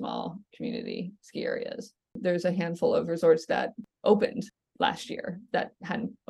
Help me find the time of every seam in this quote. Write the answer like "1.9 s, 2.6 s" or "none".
2.2 s, 3.8 s, 4.6 s